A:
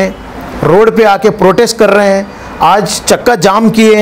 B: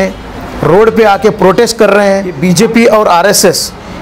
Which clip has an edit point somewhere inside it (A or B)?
B